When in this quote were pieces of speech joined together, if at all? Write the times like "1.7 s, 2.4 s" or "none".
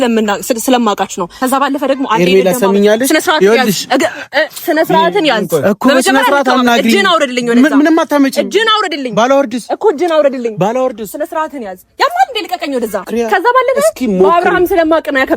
1.2 s, 13.0 s